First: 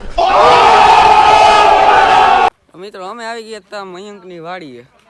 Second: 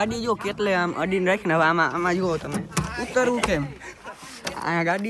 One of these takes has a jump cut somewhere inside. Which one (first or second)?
first